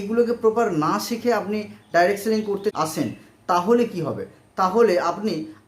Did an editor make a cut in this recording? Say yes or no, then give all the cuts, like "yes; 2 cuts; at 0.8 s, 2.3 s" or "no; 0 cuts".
yes; 1 cut; at 2.8 s